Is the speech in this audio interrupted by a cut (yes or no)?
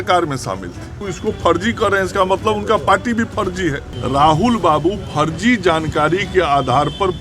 yes